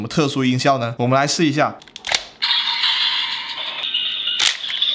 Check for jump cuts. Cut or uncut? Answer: cut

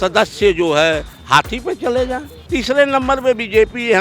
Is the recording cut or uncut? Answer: cut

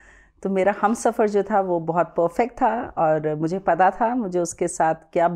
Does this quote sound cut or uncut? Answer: uncut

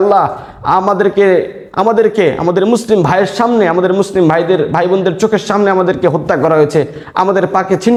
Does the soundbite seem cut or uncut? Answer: uncut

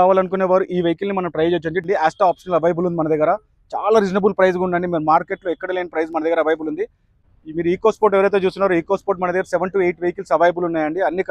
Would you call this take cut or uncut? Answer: cut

